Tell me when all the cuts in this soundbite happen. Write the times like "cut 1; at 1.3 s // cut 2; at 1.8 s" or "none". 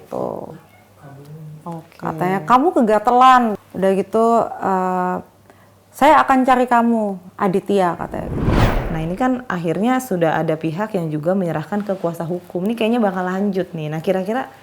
cut 1; at 3.6 s // cut 2; at 8.7 s